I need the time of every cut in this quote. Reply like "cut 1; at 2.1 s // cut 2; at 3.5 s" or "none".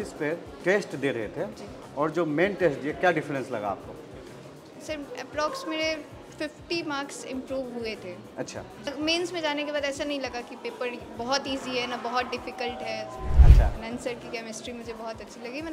cut 1; at 8.9 s // cut 2; at 13.3 s

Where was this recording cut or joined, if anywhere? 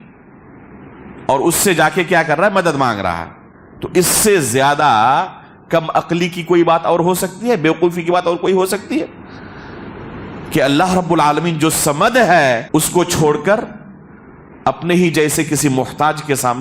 cut 1; at 12.6 s

